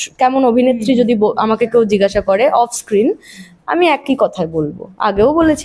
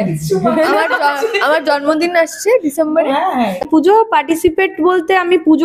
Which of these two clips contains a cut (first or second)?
second